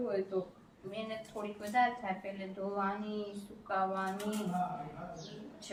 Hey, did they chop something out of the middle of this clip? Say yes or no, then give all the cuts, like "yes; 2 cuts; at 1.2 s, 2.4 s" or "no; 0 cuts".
no; 0 cuts